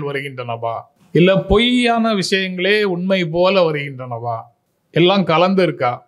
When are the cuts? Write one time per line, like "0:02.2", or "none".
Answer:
none